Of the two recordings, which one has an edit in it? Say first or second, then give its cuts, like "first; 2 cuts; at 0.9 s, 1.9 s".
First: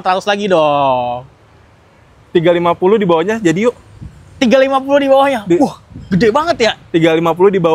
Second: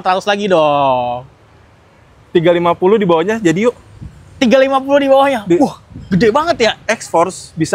second; 1 cut; at 6.8 s